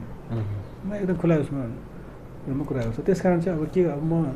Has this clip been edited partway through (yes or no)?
no